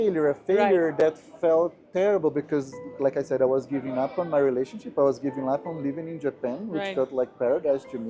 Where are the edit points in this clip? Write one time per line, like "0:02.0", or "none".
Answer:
none